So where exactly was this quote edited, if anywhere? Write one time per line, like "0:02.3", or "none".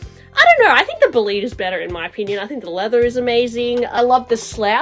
0:03.9